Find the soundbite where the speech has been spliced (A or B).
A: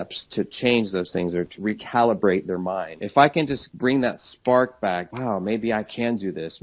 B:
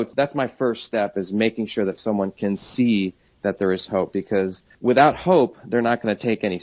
A